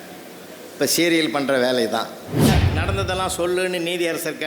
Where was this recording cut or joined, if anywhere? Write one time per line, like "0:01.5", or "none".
0:02.5